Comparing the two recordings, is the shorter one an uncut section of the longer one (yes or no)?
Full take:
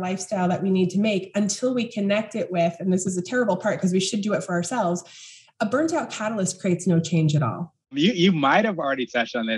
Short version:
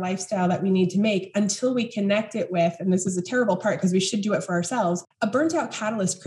no